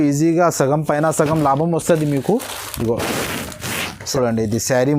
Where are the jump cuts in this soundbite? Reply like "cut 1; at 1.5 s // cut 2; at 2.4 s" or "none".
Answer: cut 1; at 3.9 s